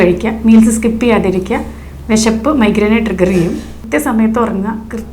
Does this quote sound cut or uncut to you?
cut